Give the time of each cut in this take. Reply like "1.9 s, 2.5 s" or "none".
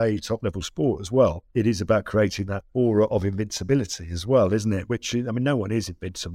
1.4 s, 2.6 s, 4.8 s